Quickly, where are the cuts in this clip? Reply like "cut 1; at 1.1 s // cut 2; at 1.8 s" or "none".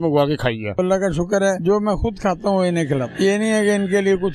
cut 1; at 0.8 s // cut 2; at 1.6 s // cut 3; at 3.1 s